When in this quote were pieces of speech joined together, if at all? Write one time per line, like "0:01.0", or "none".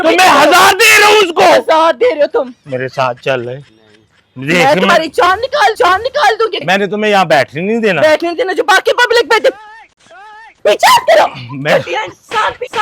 0:06.6